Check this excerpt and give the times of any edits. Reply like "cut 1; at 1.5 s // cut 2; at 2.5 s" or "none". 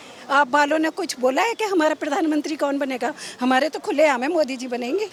none